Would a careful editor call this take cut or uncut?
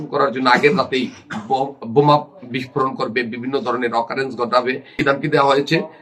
cut